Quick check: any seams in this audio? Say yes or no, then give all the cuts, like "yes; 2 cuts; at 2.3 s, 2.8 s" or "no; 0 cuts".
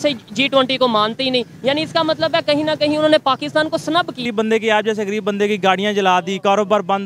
yes; 1 cut; at 4.2 s